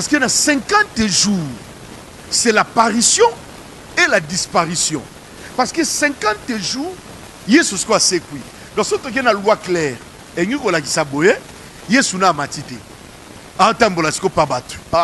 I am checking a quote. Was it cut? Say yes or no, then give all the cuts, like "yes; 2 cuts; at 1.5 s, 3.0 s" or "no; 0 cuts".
no; 0 cuts